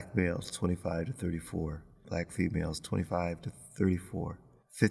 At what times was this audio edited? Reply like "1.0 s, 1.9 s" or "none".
2.0 s